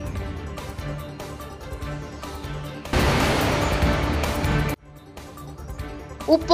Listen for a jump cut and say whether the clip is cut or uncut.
uncut